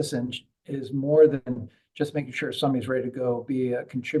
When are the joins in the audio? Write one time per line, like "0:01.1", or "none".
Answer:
none